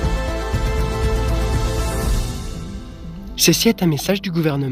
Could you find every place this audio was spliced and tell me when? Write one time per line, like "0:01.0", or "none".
0:03.4